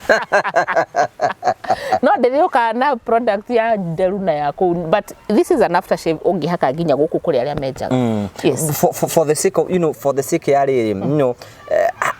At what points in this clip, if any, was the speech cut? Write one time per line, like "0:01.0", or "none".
none